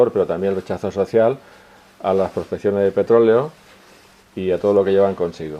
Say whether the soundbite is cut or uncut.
uncut